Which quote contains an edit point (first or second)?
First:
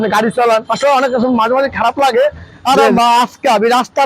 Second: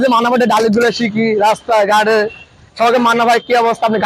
first